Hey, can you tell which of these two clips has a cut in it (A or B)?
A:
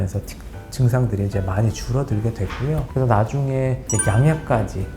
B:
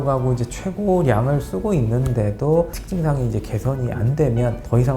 A